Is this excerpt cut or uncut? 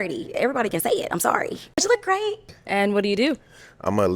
cut